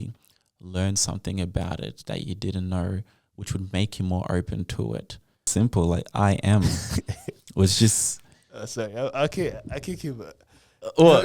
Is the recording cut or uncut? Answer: cut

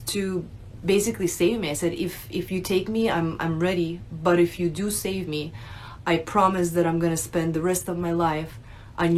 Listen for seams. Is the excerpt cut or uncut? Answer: uncut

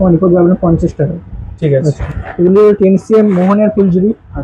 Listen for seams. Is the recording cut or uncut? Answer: uncut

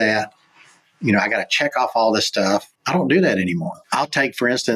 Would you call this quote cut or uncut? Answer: cut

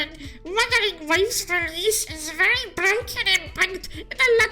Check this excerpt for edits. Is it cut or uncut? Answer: uncut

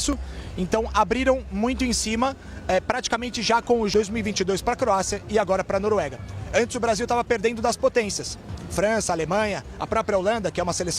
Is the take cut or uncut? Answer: cut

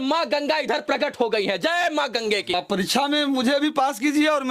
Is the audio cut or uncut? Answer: cut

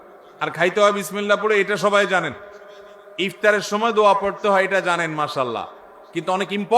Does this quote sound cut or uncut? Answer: uncut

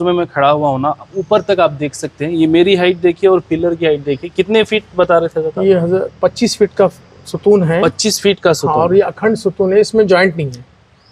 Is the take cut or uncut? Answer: uncut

